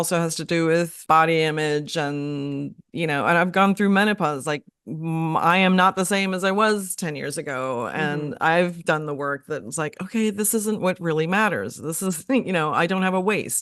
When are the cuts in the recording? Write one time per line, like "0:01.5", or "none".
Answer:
0:01.0